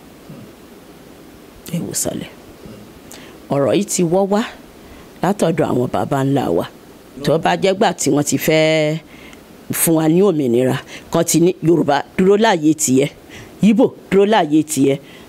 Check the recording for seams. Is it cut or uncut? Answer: cut